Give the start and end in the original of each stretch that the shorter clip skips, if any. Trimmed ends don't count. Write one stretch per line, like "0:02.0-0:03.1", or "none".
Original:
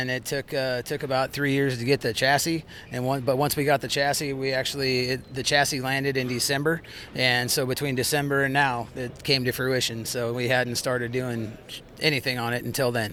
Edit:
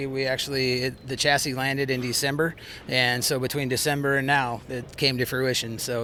none